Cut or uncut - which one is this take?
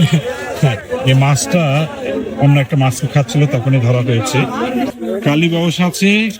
cut